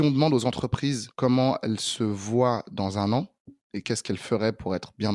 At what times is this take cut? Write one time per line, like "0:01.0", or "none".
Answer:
0:01.1